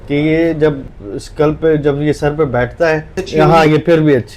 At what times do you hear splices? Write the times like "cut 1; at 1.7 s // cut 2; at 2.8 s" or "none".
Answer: cut 1; at 3.2 s

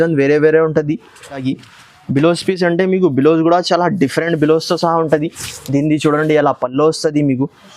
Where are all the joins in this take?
cut 1; at 1.4 s

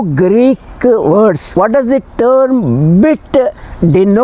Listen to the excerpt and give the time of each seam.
cut 1; at 1.4 s

